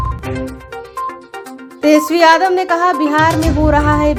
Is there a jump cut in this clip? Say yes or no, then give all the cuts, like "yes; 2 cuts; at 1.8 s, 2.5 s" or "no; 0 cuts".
no; 0 cuts